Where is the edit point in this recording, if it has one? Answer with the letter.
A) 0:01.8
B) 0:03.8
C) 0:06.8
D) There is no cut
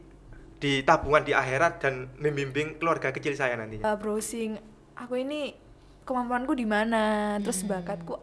B